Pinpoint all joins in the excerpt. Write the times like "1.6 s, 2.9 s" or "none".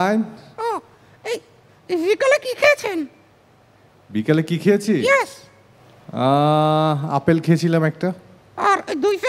none